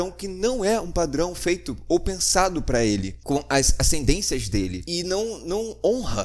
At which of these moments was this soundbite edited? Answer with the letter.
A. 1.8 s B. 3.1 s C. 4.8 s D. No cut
C